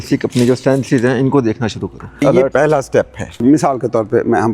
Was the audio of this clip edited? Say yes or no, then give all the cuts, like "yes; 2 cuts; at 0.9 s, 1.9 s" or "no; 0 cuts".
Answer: yes; 1 cut; at 3.2 s